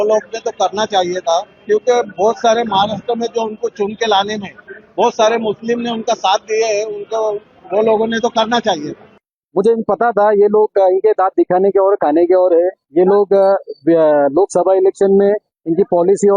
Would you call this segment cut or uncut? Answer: uncut